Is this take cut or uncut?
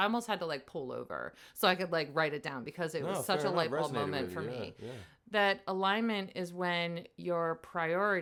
uncut